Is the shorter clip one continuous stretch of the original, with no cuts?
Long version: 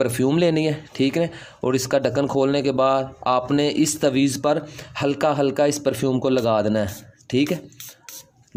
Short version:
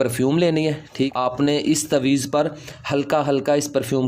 no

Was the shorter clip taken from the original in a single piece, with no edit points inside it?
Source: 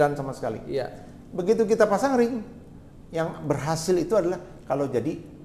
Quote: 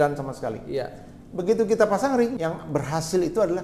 no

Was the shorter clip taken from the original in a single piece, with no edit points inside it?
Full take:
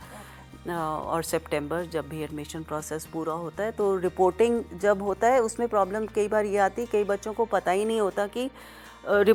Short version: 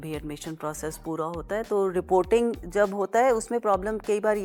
yes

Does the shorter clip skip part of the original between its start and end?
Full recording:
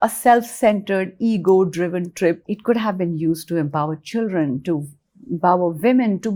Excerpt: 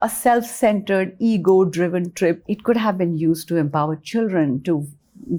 no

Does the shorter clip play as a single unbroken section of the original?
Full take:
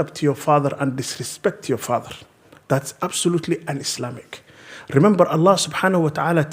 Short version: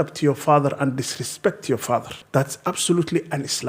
no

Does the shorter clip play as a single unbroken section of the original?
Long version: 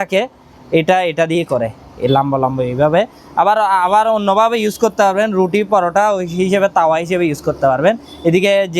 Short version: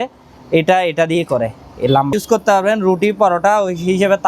no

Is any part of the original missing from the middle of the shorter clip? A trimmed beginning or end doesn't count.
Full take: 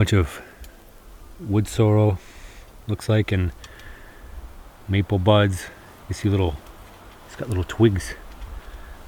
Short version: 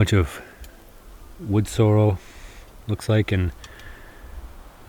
no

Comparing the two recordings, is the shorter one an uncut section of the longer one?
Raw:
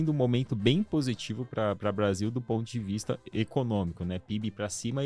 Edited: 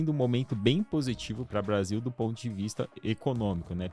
no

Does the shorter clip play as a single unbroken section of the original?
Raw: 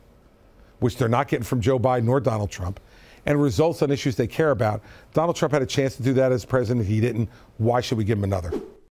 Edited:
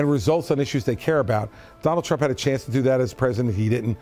yes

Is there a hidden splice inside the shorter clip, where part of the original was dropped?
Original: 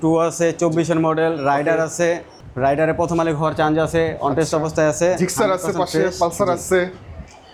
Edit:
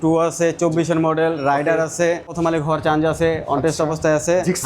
yes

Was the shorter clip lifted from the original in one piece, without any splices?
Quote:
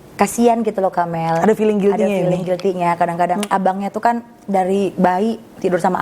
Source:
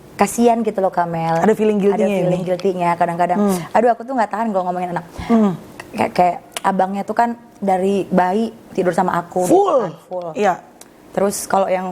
no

